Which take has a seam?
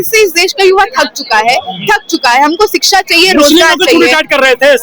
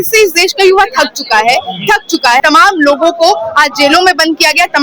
second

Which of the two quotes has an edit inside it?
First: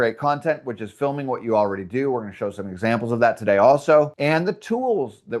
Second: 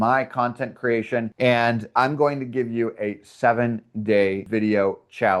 second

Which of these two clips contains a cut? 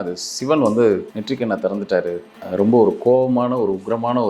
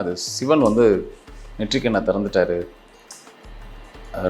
first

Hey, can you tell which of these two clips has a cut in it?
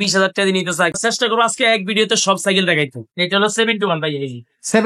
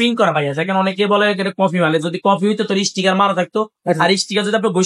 first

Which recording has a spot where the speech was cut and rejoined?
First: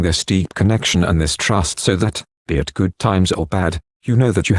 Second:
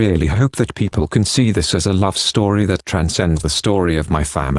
first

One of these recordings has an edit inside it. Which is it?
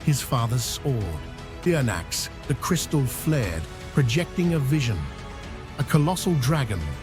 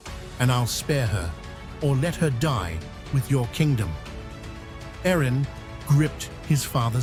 first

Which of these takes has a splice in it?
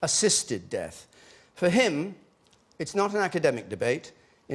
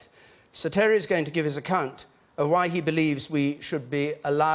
second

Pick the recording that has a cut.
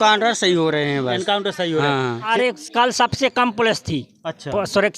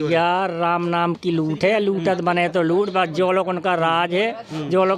first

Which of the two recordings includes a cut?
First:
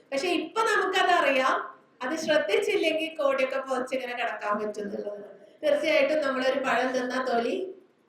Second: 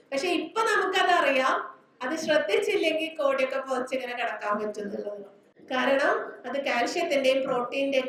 first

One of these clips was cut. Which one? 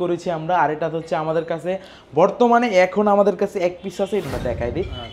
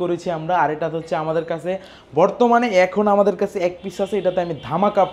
first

